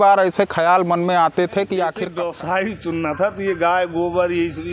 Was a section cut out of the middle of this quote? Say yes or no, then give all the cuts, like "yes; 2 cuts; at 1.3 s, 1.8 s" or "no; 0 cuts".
yes; 1 cut; at 2.1 s